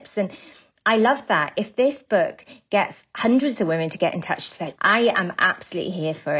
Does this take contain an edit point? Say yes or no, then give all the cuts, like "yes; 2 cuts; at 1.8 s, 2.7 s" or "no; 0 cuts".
yes; 1 cut; at 4.7 s